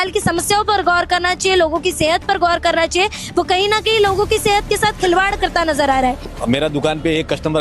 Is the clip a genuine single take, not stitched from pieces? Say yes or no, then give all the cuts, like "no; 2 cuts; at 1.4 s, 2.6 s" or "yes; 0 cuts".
no; 1 cut; at 6.3 s